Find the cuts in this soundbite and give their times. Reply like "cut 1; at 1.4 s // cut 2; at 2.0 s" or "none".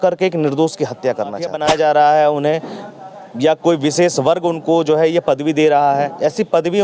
cut 1; at 1.5 s